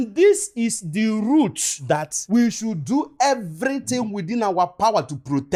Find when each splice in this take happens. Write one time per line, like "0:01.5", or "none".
none